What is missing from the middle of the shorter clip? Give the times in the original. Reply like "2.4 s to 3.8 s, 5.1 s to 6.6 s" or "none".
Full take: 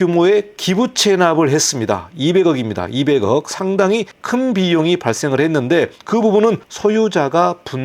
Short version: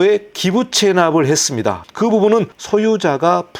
2.1 s to 6.0 s